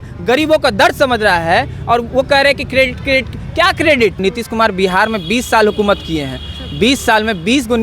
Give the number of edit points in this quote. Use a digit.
1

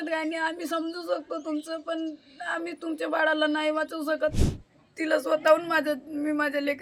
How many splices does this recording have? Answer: 1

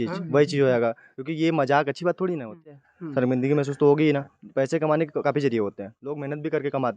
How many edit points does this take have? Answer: 1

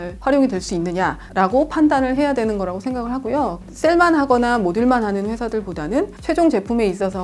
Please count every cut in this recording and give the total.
1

